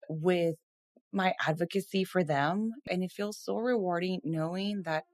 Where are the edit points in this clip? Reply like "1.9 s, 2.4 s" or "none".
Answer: 2.9 s